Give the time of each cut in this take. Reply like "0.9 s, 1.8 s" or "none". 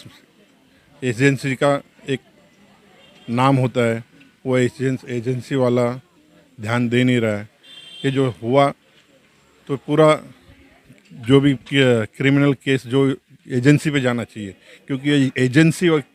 none

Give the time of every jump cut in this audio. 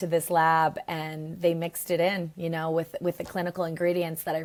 none

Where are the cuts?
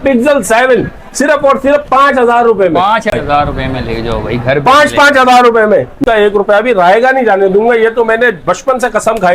3.1 s, 6.0 s

